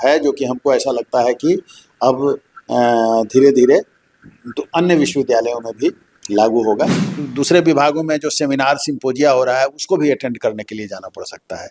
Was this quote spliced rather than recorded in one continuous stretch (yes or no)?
yes